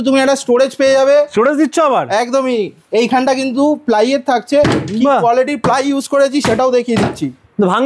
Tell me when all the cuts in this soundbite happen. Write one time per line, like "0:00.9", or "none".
none